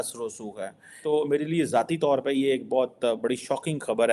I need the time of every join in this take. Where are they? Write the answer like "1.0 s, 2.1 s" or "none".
0.9 s